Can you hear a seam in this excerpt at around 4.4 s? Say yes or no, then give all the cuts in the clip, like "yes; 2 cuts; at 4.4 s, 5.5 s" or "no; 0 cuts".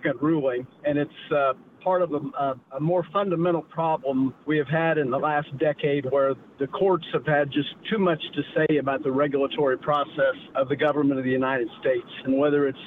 yes; 2 cuts; at 4.4 s, 10.5 s